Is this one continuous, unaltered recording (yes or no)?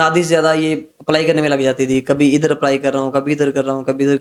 yes